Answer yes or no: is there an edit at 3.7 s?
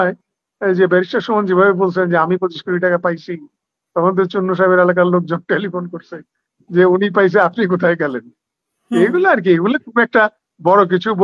no